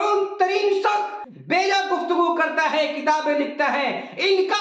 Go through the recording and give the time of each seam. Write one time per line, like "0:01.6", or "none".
0:01.2